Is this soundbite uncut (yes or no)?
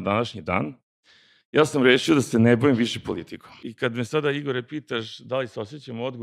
no